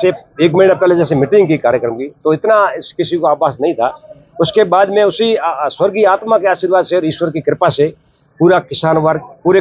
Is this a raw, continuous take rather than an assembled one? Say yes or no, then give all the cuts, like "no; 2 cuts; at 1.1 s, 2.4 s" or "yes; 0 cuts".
yes; 0 cuts